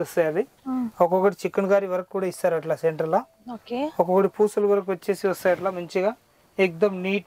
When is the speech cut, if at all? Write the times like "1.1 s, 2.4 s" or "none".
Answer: none